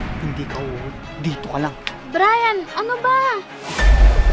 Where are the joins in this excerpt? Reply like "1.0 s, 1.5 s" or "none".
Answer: none

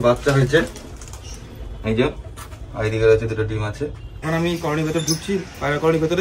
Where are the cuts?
4.1 s

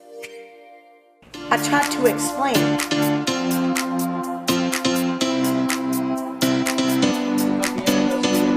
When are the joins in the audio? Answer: 1.0 s

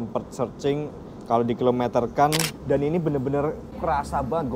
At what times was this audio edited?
2.5 s, 3.8 s

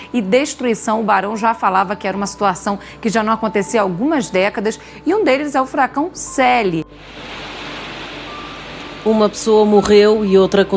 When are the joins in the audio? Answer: none

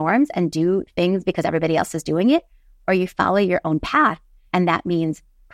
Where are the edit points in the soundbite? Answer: none

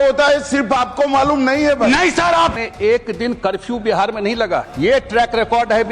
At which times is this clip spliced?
2.5 s, 4.7 s

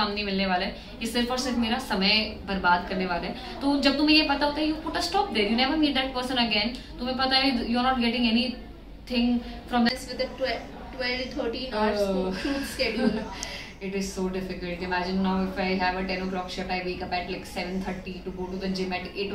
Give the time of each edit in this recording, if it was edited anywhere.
9.9 s

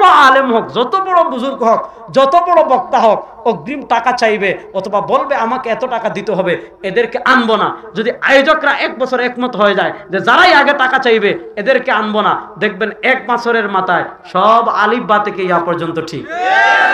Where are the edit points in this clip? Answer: none

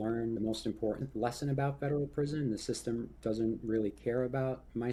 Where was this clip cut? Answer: none

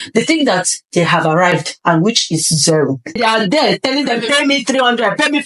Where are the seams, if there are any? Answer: 3.2 s

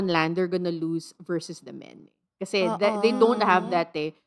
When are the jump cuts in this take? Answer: none

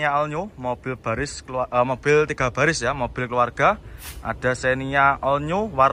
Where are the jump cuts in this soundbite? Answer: none

